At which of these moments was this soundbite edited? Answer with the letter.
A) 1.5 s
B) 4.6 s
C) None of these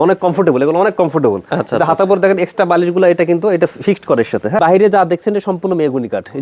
B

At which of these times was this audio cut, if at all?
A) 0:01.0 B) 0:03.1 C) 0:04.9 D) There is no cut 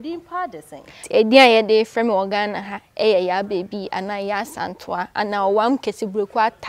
A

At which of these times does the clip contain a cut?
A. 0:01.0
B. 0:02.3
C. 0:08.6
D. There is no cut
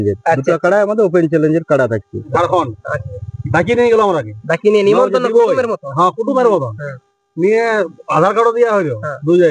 B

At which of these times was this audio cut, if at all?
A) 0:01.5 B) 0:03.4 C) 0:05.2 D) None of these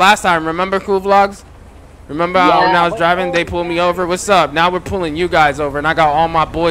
D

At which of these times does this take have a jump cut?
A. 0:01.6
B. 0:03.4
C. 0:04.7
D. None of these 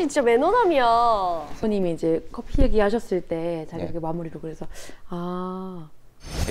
A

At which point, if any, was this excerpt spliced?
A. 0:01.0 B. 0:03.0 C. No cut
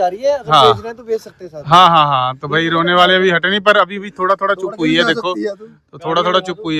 C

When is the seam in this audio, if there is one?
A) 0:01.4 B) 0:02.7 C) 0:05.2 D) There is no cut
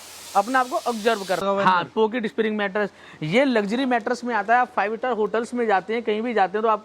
A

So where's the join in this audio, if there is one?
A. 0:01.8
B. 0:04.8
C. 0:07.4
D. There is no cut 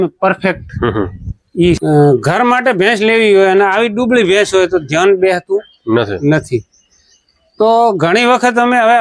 A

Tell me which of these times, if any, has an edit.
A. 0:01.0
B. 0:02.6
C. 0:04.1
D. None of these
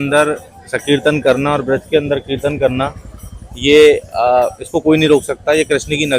D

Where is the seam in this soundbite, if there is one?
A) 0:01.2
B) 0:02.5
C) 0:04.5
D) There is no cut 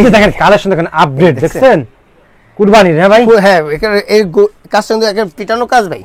D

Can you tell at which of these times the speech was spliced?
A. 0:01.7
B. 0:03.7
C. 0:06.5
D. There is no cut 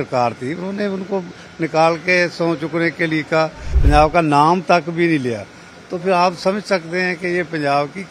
B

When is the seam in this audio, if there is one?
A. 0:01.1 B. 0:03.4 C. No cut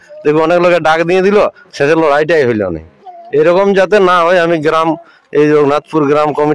C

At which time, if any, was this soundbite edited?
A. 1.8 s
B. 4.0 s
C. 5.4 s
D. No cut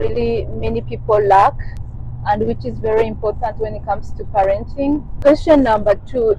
D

